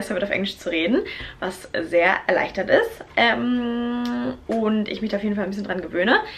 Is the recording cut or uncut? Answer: uncut